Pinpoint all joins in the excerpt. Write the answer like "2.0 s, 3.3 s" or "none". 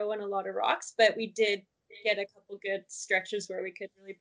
none